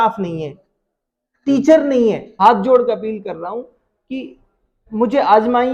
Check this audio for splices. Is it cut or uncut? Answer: cut